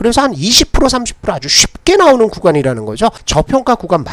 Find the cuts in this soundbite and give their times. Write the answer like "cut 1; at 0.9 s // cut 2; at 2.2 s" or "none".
cut 1; at 3.2 s